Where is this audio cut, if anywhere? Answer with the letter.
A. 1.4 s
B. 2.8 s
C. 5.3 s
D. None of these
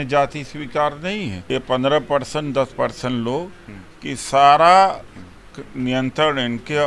A